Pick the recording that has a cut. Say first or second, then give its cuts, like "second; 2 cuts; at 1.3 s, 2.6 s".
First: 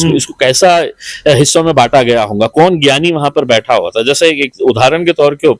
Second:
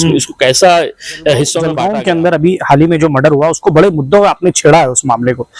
second; 1 cut; at 1.6 s